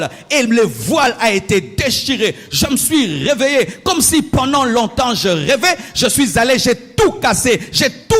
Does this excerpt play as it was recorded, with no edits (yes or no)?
yes